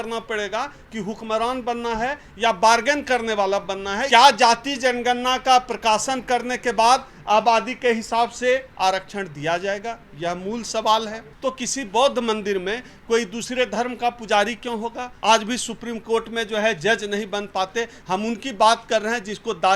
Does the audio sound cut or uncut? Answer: cut